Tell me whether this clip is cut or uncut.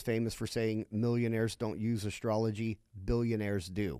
uncut